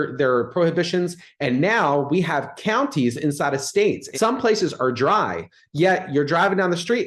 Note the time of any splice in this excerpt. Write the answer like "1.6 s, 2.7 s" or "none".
4.1 s